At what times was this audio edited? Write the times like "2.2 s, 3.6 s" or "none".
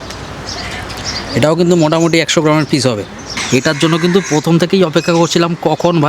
3.4 s